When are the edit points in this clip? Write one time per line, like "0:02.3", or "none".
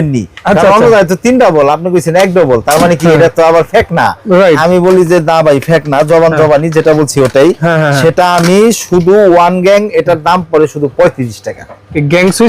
none